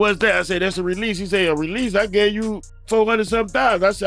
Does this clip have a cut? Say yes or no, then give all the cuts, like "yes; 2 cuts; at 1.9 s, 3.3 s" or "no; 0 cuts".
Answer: no; 0 cuts